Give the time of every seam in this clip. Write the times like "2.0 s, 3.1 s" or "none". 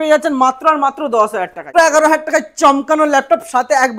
1.7 s